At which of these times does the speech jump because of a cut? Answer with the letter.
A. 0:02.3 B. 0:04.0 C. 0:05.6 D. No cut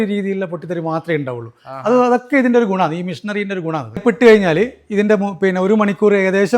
B